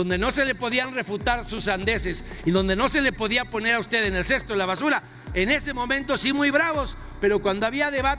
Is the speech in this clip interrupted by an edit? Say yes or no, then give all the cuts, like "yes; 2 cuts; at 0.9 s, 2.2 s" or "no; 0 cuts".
no; 0 cuts